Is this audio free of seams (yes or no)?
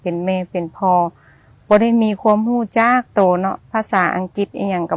yes